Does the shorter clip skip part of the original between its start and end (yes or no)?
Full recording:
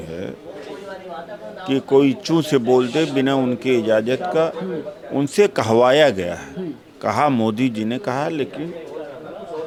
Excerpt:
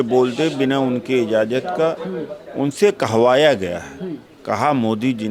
no